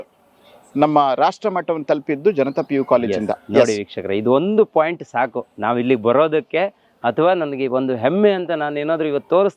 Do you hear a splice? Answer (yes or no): no